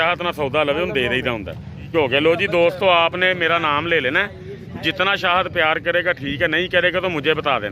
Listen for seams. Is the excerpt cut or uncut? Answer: cut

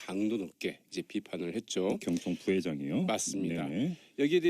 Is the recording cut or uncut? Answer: cut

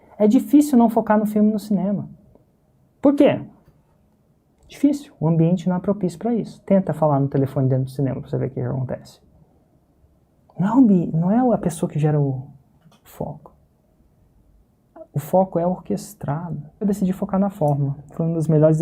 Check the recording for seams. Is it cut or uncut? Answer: cut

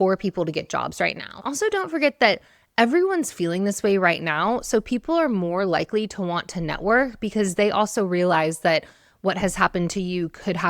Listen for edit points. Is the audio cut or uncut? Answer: cut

